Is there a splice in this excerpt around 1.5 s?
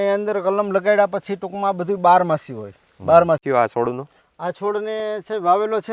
no; 1 cut; at 3.4 s

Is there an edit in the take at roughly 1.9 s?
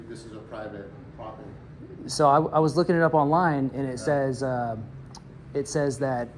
no; 0 cuts

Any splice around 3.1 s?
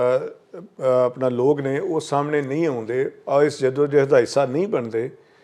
no; 0 cuts

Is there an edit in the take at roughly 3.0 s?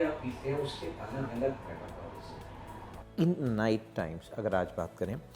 yes; 1 cut; at 3.0 s

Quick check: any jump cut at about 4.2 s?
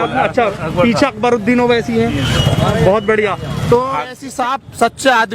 yes; 1 cut; at 4.2 s

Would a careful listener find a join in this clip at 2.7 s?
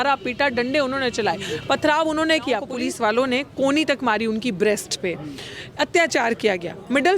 yes; 1 cut; at 2.7 s

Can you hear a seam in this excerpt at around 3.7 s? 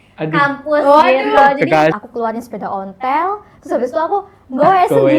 no; 1 cut; at 2.0 s

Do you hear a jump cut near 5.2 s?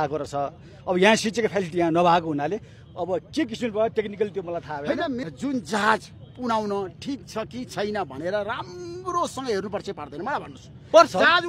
yes; 1 cut; at 5.2 s

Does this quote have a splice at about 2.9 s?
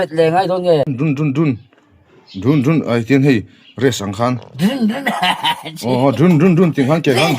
no; 1 cut; at 0.9 s

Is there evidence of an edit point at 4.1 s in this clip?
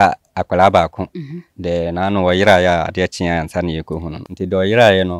yes; 1 cut; at 4.1 s

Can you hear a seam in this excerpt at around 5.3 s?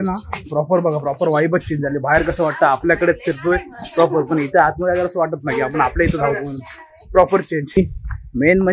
no; 1 cut; at 7.6 s

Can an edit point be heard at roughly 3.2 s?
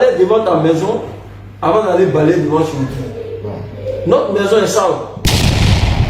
no; 1 cut; at 5.1 s

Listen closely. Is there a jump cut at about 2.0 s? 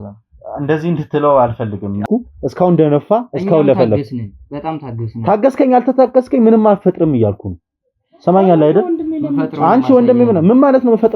yes; 1 cut; at 2.0 s

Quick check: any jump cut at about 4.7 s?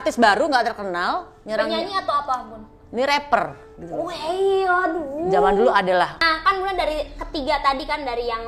no; 1 cut; at 6.2 s

